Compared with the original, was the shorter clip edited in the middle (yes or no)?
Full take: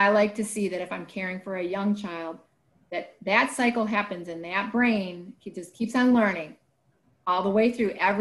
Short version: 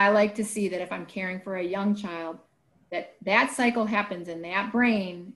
no